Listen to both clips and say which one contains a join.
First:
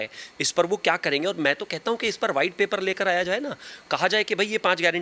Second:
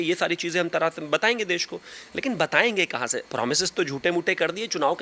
second; 1 cut; at 3.2 s

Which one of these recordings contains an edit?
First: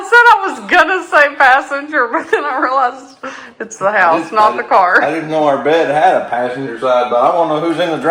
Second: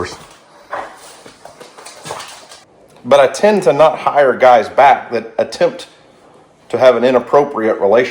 second; 1 cut; at 2.6 s

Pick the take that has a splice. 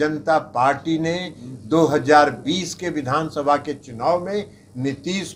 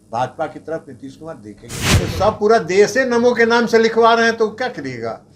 second; 1 cut; at 1.9 s

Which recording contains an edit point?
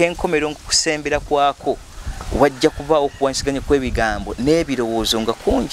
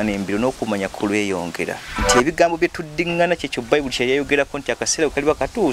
second; 1 cut; at 1.9 s

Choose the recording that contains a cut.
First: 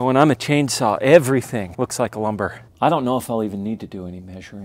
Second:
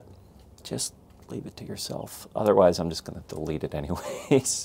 first; 2 cuts; at 1.7 s, 2.5 s

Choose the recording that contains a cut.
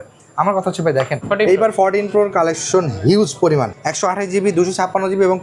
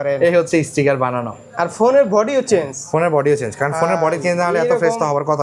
first; 2 cuts; at 1.2 s, 3.8 s

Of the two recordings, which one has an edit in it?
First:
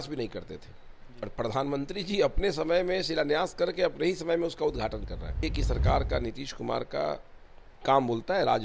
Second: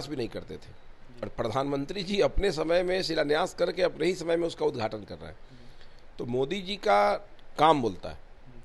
first; 1 cut; at 5.4 s

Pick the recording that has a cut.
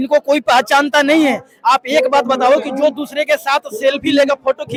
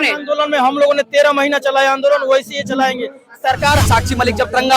second; 1 cut; at 3.9 s

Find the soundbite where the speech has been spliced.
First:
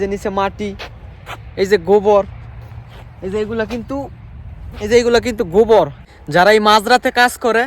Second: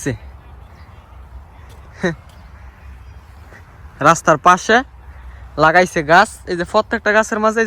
first; 1 cut; at 6.0 s

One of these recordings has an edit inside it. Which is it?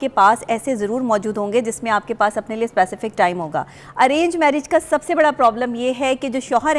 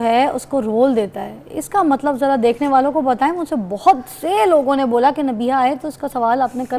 first; 1 cut; at 3.8 s

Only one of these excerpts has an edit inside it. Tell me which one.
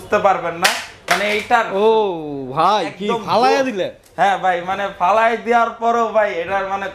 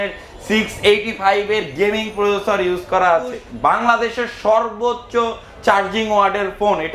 second; 1 cut; at 3.5 s

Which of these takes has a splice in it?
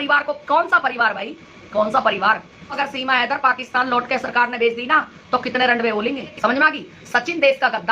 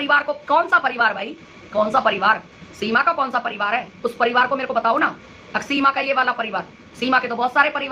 first; 2 cuts; at 2.8 s, 6.3 s

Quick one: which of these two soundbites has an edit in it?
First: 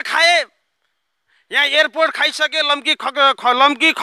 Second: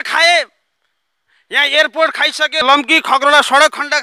second; 1 cut; at 2.6 s

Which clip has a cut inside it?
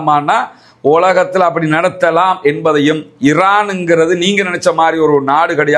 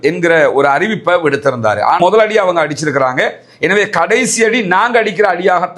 second; 1 cut; at 2.0 s

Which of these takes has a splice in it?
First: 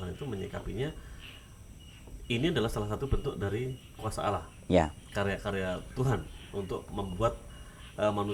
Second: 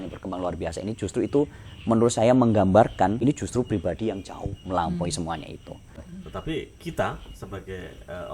second; 2 cuts; at 3.2 s, 6.2 s

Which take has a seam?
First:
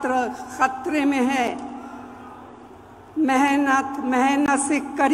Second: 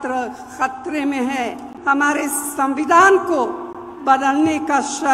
second; 1 cut; at 1.7 s

